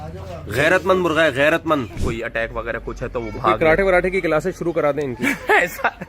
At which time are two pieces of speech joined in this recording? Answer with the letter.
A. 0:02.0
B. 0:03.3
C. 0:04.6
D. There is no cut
A